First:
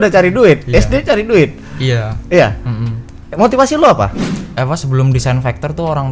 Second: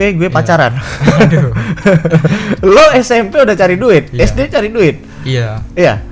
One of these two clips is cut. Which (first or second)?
first